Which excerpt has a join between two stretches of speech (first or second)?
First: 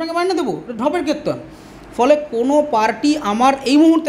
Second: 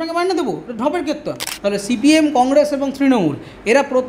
second